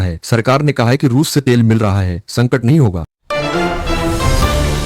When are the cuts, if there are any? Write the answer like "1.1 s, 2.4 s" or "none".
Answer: 3.1 s